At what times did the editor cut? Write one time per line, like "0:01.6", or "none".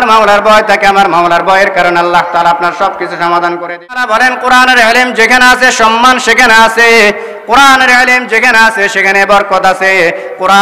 0:04.0